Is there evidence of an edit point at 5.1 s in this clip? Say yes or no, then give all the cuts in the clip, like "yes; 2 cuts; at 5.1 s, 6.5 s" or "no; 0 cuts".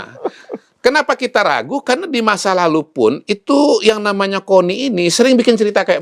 yes; 1 cut; at 5.1 s